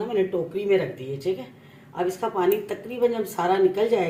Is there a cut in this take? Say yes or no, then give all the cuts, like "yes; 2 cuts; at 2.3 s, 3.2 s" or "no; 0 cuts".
no; 0 cuts